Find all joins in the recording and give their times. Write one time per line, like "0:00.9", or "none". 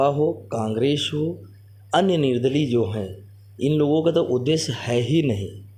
none

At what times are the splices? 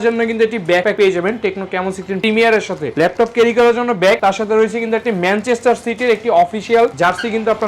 0:00.9
0:02.2

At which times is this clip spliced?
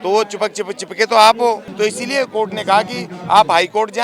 0:01.7

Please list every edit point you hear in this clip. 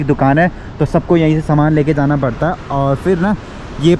none

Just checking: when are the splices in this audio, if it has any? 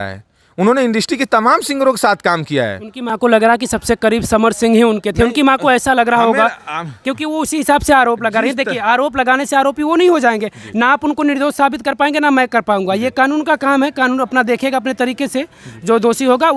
none

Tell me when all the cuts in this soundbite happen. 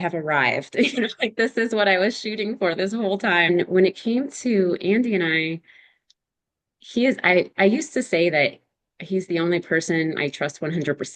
0:03.5

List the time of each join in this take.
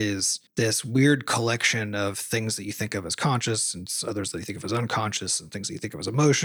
none

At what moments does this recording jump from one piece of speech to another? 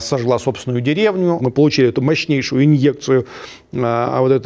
0:01.4

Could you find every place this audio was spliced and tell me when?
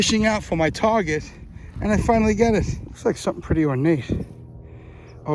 0:02.8

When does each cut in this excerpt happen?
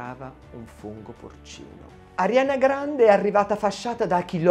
0:01.8

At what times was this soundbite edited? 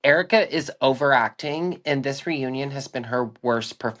none

